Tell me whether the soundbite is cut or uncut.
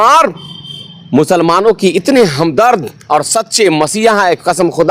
uncut